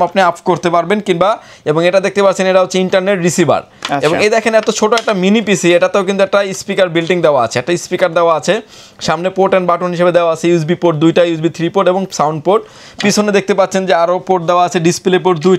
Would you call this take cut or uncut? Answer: uncut